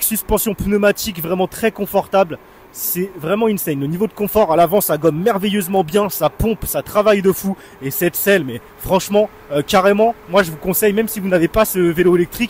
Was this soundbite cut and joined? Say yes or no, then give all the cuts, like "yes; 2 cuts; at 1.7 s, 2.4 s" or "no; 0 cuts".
no; 0 cuts